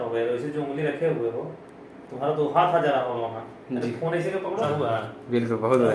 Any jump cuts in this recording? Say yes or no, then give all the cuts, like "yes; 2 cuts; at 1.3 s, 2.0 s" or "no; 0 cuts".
yes; 1 cut; at 4.7 s